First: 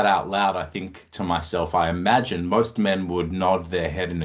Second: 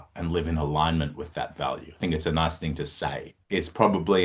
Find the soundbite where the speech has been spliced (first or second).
second